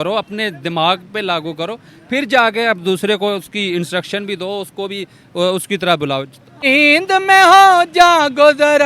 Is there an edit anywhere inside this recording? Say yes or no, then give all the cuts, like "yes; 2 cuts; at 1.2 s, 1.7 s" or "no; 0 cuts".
yes; 1 cut; at 6.6 s